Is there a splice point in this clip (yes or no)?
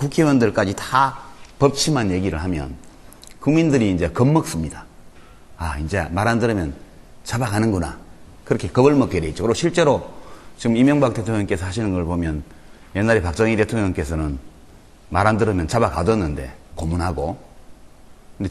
yes